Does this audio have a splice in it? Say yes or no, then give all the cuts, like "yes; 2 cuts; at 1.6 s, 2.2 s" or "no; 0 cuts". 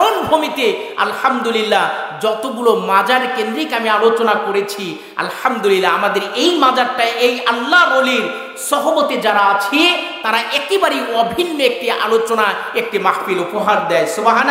no; 0 cuts